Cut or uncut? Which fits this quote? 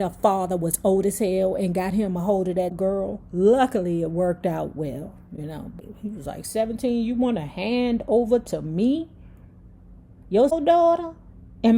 cut